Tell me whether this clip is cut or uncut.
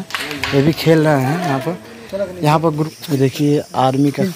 cut